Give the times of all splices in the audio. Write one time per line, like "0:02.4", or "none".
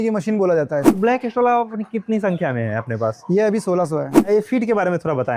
0:00.9
0:04.2